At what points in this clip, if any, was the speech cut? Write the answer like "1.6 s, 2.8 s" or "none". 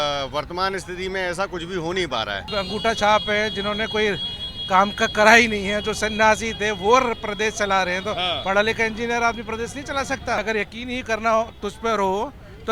2.4 s, 10.4 s